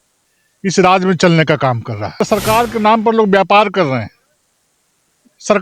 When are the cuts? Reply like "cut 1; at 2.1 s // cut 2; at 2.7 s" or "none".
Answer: cut 1; at 2.2 s